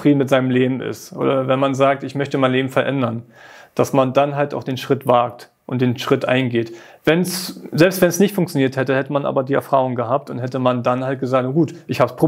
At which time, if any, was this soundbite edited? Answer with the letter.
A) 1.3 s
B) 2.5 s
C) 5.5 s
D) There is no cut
D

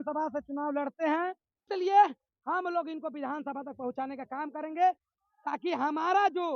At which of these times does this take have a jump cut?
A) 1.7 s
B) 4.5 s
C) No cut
A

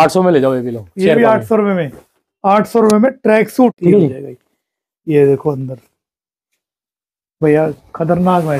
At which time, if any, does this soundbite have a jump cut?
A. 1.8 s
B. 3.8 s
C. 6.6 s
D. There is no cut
B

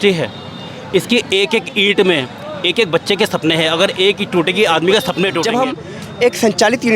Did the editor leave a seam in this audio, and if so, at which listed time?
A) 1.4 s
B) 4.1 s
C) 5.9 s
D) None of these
C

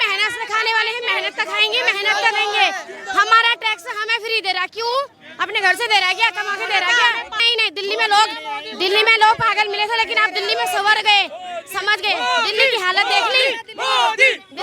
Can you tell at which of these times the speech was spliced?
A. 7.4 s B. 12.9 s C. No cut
A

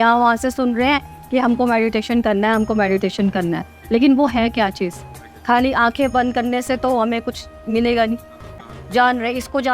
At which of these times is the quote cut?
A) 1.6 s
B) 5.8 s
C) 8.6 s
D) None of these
C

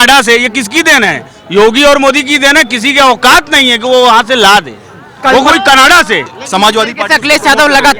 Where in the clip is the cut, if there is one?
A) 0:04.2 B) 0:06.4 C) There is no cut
B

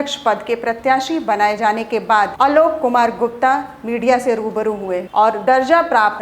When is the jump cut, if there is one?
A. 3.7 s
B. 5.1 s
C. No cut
B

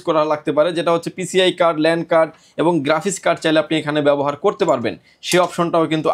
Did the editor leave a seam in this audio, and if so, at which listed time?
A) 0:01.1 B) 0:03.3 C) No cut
C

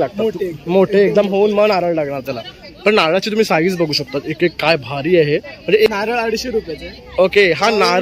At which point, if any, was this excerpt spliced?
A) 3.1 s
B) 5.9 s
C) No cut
B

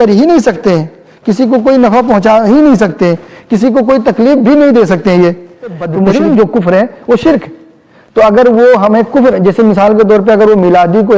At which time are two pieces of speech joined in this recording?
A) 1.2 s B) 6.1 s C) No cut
B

